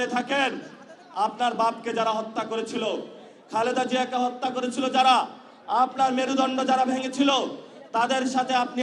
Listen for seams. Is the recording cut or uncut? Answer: uncut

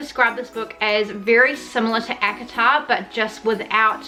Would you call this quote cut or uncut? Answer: uncut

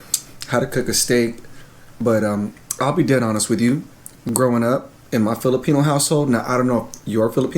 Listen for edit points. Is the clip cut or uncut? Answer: uncut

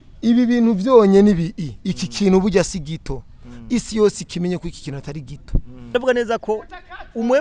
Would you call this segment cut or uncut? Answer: cut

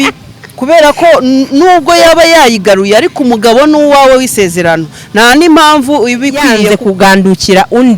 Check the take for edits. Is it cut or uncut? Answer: cut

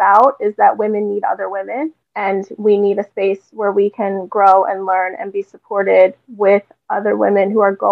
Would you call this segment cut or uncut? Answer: cut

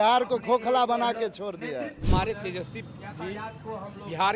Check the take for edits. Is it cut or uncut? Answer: cut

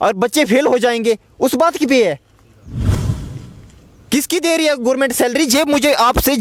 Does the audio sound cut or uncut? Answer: uncut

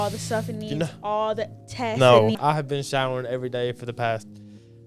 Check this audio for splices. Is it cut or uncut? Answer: cut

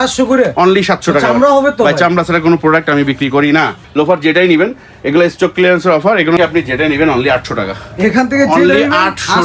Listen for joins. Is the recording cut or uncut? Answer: cut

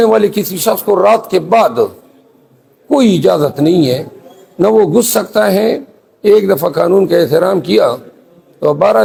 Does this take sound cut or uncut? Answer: uncut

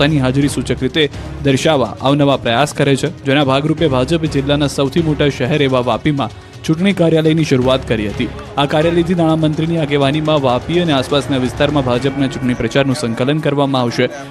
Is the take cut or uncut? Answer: cut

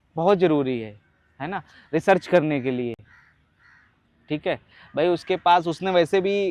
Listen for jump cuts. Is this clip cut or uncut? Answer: uncut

